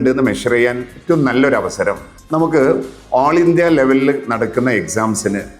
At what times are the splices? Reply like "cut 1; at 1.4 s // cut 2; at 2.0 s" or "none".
cut 1; at 2.1 s